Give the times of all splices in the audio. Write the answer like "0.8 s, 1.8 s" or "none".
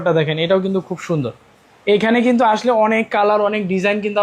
none